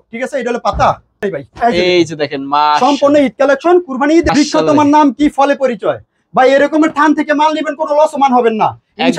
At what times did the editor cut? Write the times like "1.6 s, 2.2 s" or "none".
1.1 s, 4.3 s